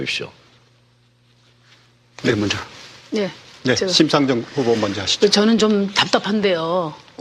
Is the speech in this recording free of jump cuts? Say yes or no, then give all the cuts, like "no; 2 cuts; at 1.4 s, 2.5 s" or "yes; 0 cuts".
no; 1 cut; at 1.7 s